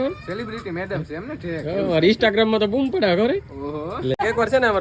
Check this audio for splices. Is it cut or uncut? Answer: uncut